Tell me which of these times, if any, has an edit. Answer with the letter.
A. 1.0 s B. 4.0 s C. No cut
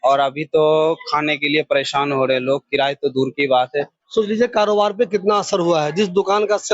B